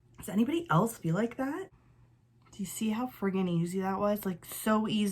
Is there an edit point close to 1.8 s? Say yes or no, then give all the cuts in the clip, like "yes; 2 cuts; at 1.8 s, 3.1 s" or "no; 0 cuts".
yes; 1 cut; at 1.8 s